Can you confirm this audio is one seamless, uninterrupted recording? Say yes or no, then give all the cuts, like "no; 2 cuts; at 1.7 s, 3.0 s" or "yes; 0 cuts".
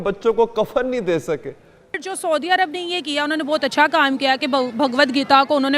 no; 1 cut; at 2.0 s